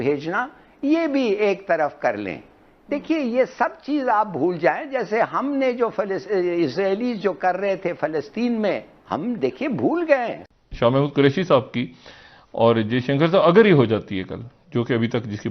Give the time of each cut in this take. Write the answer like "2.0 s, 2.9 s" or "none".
10.4 s